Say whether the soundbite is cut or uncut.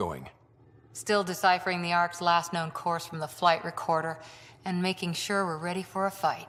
uncut